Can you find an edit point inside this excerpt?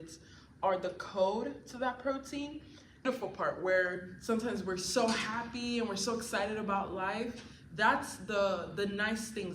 yes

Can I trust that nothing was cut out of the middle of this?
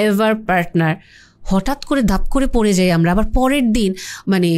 yes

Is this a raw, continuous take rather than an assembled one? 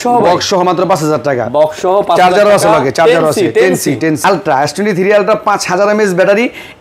no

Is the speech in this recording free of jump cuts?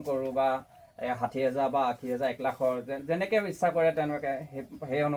yes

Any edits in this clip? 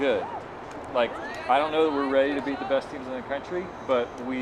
yes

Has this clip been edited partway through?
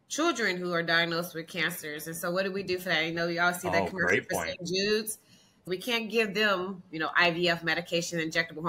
yes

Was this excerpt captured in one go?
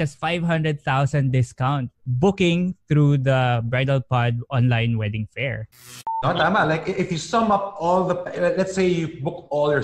yes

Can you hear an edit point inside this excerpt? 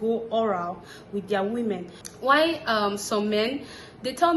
yes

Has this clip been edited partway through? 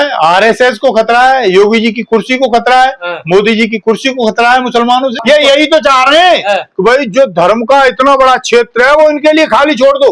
yes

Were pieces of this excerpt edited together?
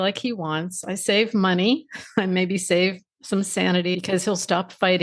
yes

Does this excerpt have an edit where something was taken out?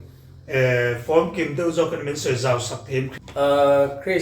yes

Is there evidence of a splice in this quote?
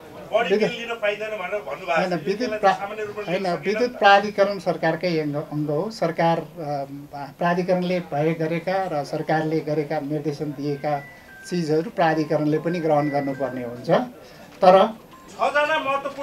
yes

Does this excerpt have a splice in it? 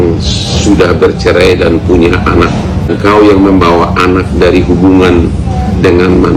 yes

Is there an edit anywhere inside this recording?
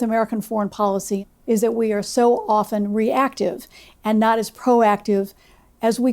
yes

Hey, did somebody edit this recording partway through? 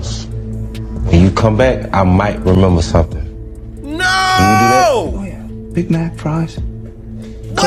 no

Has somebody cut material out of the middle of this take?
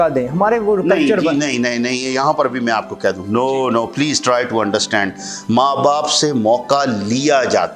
no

